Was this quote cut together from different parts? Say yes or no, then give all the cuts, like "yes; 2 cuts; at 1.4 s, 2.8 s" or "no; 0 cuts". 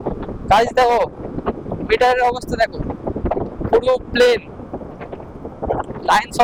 no; 0 cuts